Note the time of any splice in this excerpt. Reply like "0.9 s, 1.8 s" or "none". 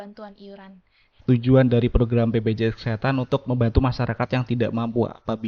1.1 s